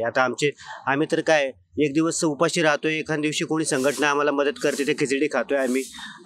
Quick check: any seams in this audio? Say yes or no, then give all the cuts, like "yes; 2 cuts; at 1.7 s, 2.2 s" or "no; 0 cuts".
no; 0 cuts